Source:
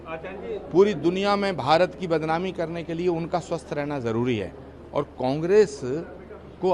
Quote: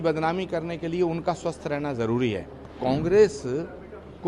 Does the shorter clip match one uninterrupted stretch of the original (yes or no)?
no